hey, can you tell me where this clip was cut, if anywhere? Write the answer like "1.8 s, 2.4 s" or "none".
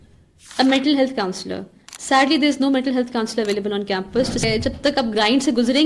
4.5 s